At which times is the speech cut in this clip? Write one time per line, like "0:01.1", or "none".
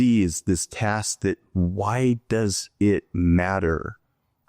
none